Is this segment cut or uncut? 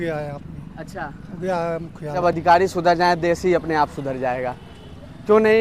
cut